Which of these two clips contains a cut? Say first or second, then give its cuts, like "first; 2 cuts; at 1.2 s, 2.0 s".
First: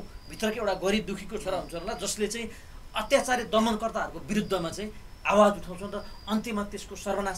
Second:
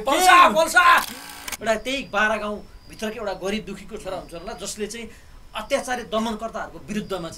second; 1 cut; at 1.3 s